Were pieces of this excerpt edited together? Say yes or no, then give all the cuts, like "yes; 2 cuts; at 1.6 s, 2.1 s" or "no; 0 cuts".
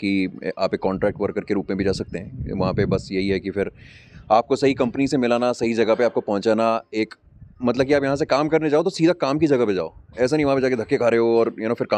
no; 0 cuts